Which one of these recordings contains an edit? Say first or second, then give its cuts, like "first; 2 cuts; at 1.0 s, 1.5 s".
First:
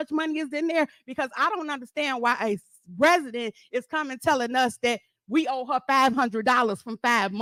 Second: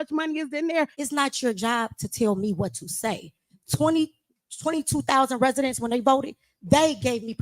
second; 1 cut; at 1.0 s